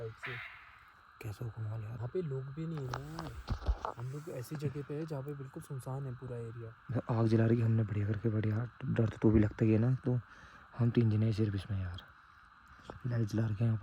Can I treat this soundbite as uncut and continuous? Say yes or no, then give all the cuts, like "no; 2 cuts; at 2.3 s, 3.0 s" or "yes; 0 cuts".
no; 1 cut; at 2.0 s